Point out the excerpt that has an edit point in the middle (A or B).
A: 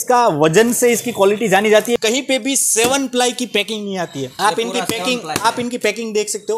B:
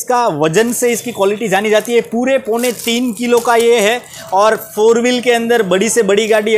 A